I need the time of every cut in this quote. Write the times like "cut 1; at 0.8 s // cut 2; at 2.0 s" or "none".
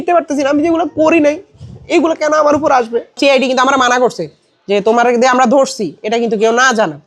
cut 1; at 3.2 s